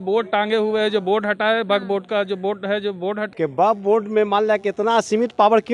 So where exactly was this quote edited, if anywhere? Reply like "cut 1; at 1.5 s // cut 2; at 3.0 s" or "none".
cut 1; at 3.3 s

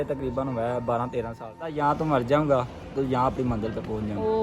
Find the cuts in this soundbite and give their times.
cut 1; at 1.7 s

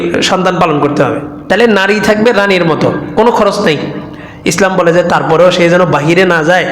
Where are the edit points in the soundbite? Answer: cut 1; at 1.3 s

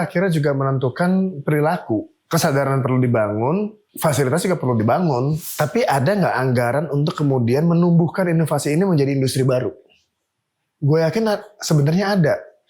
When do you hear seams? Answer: cut 1; at 2.2 s // cut 2; at 3.8 s // cut 3; at 5.4 s

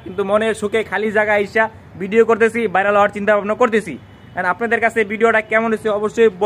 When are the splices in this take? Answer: none

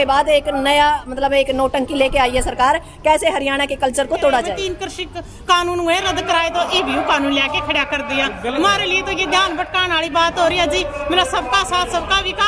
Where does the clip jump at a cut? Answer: cut 1; at 4.6 s

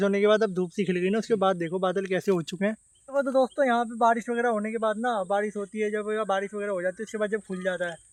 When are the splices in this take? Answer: none

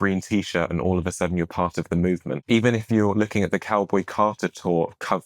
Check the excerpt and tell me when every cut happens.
cut 1; at 2.3 s

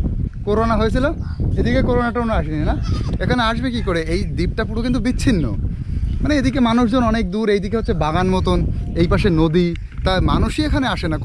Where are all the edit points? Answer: none

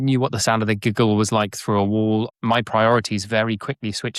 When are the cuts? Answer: cut 1; at 2.3 s

